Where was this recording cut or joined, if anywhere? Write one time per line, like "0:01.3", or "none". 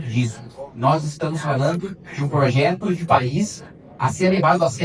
none